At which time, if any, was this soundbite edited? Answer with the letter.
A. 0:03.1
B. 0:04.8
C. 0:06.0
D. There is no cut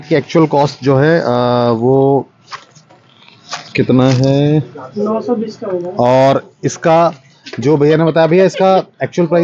B